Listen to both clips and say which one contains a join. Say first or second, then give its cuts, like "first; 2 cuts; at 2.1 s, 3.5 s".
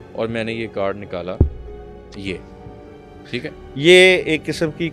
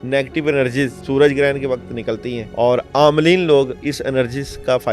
second; 2 cuts; at 1.0 s, 2.4 s